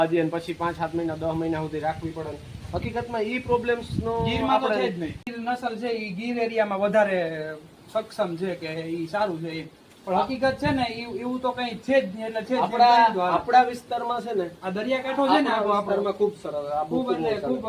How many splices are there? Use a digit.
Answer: 1